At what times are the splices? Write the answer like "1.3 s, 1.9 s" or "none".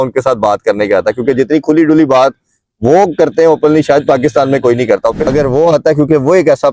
5.3 s